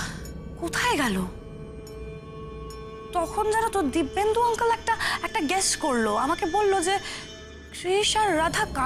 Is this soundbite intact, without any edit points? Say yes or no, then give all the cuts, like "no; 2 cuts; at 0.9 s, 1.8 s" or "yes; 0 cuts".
yes; 0 cuts